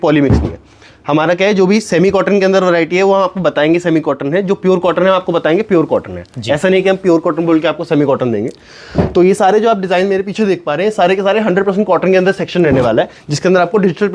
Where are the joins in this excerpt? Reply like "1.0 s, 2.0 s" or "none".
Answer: none